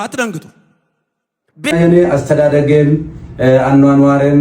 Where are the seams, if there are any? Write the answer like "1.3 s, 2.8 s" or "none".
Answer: 1.7 s